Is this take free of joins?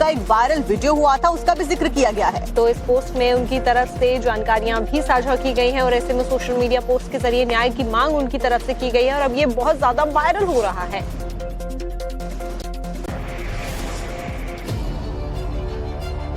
yes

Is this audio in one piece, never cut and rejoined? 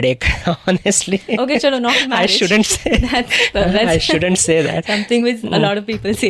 yes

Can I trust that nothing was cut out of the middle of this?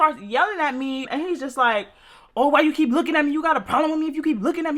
no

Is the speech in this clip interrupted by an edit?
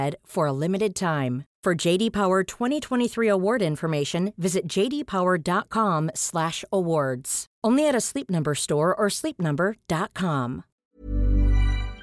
yes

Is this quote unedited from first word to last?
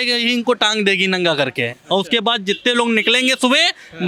yes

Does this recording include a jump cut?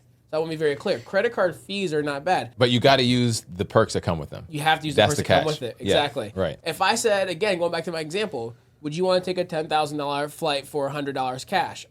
yes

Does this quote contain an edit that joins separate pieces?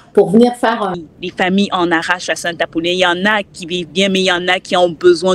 yes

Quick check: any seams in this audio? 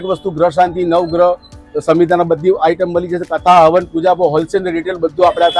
no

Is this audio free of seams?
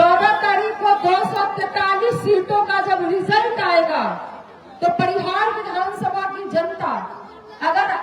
yes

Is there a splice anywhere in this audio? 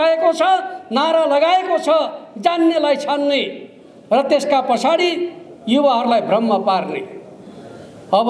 no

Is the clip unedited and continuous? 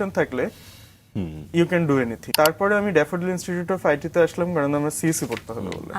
no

